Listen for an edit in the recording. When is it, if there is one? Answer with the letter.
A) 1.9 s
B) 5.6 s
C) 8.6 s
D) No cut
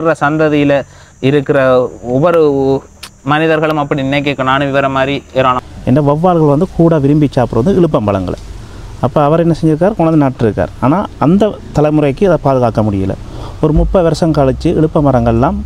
B